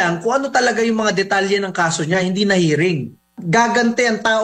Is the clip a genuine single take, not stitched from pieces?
no; 1 cut; at 3.4 s

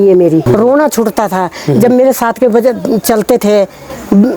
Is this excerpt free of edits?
yes; 0 cuts

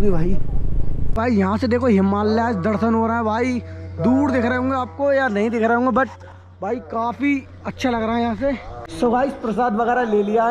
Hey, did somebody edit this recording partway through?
yes; 2 cuts; at 1.1 s, 8.9 s

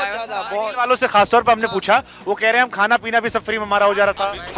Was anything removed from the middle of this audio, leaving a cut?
no; 0 cuts

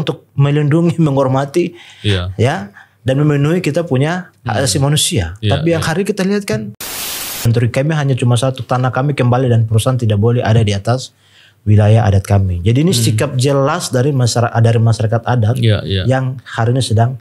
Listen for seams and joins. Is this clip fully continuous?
no; 1 cut; at 7.2 s

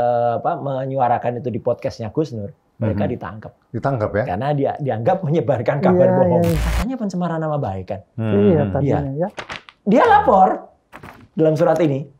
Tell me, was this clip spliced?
yes; 1 cut; at 6.6 s

